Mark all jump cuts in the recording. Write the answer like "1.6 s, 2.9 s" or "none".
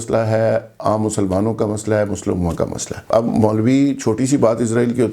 2.9 s